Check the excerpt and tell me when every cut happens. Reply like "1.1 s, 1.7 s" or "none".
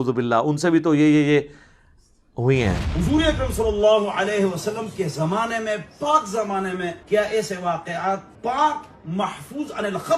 none